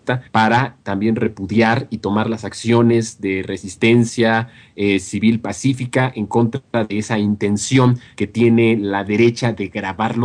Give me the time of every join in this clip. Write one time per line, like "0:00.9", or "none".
0:09.2